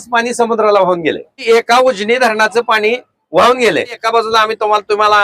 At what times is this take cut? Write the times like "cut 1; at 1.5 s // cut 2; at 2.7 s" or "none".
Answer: cut 1; at 1.4 s // cut 2; at 4.0 s